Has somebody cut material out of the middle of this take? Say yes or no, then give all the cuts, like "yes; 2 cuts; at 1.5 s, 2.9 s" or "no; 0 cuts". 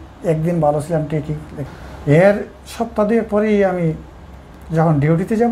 yes; 1 cut; at 1.5 s